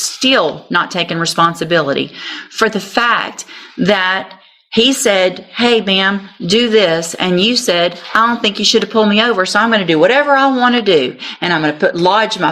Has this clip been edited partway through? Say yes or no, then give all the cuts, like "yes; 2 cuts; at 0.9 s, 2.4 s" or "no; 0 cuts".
no; 0 cuts